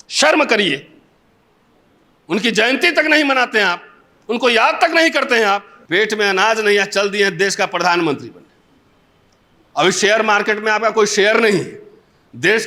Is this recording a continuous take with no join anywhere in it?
no; 1 cut; at 5.7 s

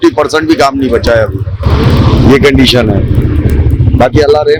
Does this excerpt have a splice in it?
no; 0 cuts

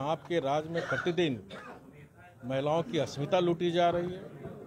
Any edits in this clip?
no; 0 cuts

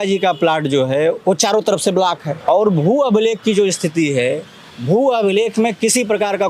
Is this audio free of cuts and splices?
no; 1 cut; at 2.3 s

